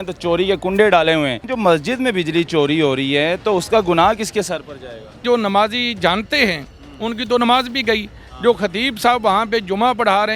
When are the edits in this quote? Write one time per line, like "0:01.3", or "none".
0:01.5
0:05.2